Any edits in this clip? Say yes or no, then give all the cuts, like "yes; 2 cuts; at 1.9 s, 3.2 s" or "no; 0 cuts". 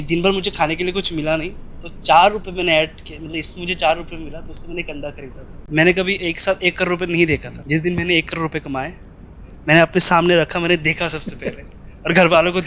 yes; 2 cuts; at 5.5 s, 7.5 s